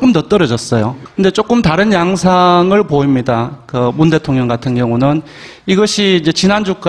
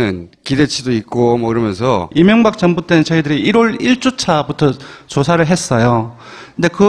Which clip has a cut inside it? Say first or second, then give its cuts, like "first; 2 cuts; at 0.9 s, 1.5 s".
first; 1 cut; at 1.2 s